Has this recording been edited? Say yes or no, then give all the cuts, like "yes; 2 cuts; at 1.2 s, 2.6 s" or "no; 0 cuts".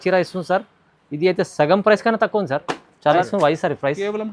yes; 1 cut; at 3.1 s